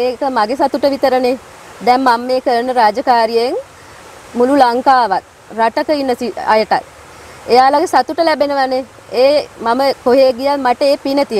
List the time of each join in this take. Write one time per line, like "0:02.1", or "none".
none

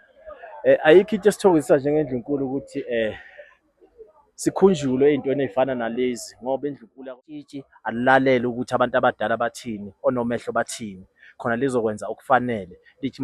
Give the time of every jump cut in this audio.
0:06.9

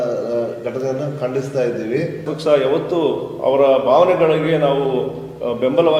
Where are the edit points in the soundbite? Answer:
0:02.3

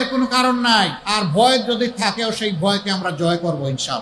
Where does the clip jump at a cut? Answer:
0:01.0

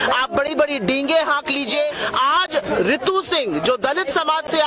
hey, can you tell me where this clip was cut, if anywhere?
0:02.0

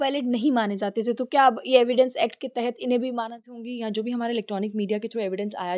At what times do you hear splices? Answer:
0:03.6

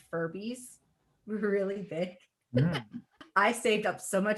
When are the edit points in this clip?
0:03.2

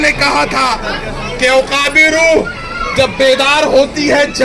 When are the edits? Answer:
none

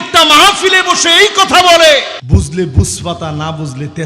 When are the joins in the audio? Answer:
0:02.2

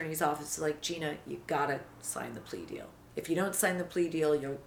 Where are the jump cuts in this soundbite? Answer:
none

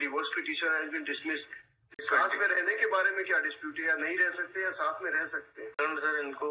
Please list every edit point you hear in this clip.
0:02.0
0:05.7

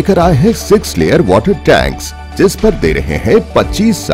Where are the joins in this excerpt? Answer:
none

